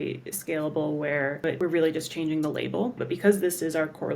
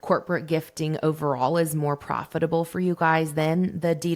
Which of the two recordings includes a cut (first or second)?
first